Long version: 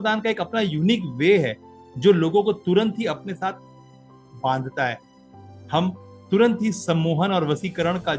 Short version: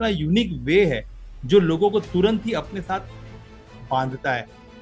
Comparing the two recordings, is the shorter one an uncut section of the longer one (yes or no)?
yes